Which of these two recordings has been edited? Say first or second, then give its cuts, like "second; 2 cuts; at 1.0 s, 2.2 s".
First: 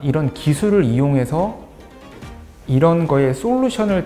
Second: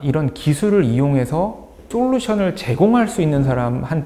second; 1 cut; at 1.9 s